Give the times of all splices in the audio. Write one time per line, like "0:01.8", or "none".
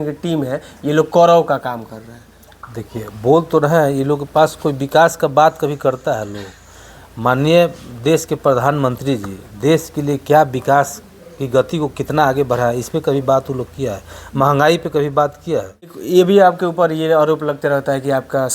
0:16.0